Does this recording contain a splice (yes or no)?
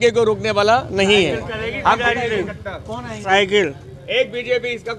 no